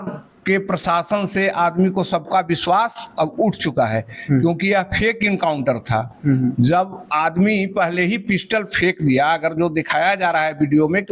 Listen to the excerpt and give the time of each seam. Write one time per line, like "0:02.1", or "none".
none